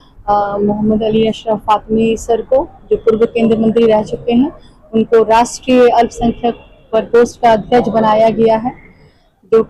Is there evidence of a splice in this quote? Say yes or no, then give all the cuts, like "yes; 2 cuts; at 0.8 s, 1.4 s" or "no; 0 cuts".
no; 0 cuts